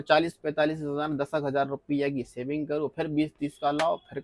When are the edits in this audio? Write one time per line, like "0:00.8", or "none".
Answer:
none